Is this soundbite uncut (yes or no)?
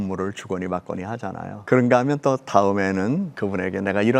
no